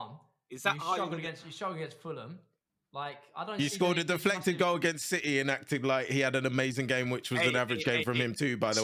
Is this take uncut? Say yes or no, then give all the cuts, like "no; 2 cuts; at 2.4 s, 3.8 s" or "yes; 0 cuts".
yes; 0 cuts